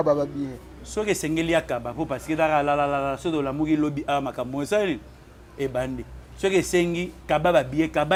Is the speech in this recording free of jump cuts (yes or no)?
yes